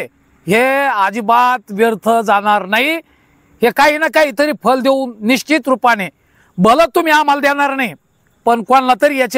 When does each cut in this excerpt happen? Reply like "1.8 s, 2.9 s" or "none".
none